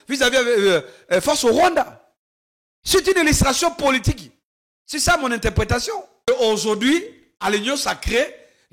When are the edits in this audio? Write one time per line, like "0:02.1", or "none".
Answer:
0:06.2